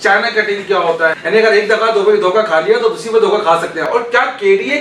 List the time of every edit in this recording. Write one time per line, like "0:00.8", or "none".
0:01.2
0:03.8